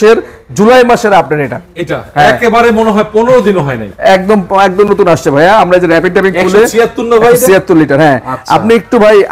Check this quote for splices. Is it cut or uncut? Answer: uncut